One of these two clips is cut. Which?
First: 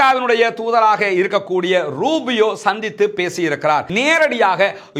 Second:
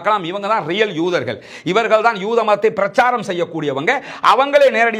first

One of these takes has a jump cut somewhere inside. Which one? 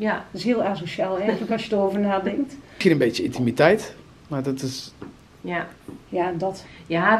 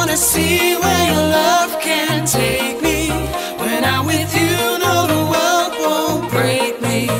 first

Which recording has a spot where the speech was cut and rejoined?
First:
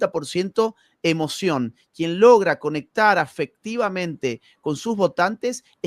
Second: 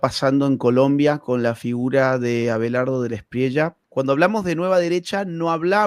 second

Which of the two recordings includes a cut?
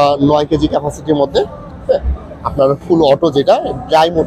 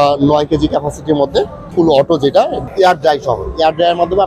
second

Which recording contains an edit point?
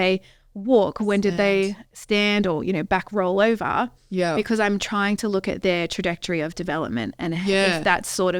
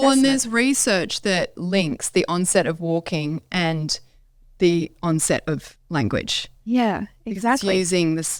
second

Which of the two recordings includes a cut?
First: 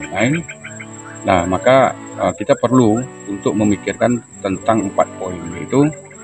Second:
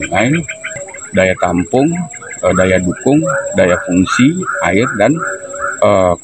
second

